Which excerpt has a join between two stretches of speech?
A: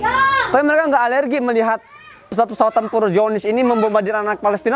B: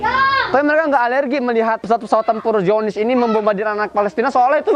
B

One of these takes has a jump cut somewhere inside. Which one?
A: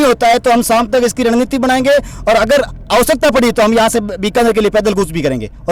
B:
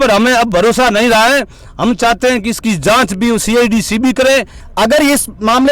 B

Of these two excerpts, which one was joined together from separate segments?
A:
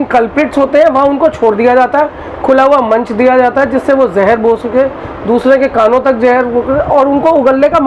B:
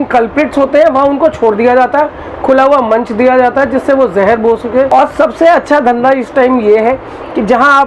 B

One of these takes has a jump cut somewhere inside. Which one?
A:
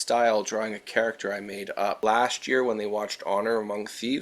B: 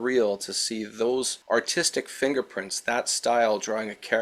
A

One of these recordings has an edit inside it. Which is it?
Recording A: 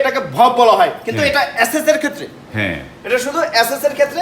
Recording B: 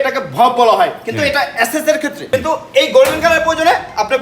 B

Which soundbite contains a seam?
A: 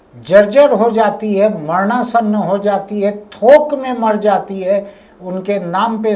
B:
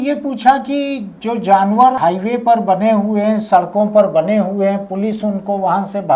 B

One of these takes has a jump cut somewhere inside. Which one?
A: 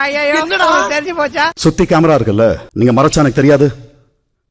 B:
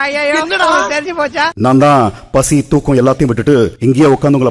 B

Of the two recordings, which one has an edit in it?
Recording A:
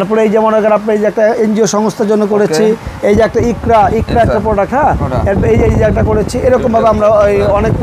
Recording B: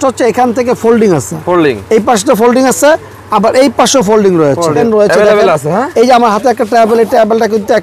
B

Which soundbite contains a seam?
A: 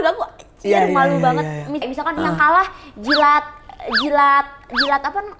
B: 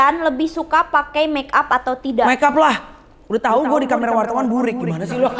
A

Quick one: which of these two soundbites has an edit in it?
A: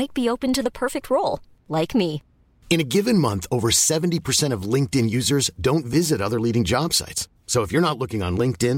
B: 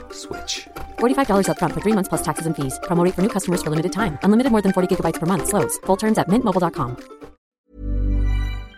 B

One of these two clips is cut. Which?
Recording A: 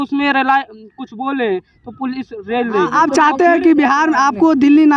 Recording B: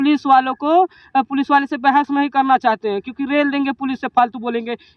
A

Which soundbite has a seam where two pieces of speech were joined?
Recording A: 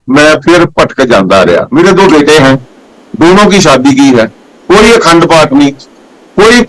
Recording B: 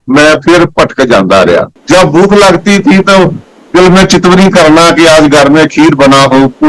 A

